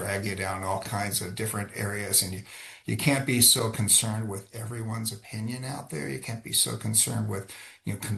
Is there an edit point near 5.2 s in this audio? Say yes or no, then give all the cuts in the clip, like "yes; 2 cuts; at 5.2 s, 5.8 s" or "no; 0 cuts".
no; 0 cuts